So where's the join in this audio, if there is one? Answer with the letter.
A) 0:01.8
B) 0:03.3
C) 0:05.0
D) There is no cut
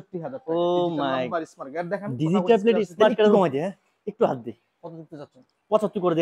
B